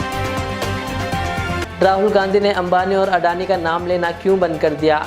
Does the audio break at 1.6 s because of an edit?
yes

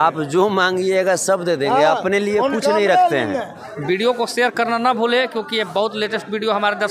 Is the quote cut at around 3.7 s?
yes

